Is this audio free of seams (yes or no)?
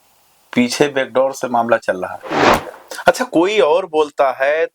no